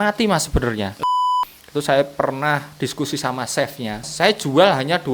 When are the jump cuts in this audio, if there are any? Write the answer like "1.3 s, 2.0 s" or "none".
1.2 s, 4.1 s